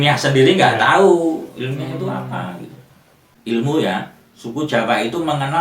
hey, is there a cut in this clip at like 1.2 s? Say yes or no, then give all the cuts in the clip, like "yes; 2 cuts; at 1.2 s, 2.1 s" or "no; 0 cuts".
no; 1 cut; at 3.3 s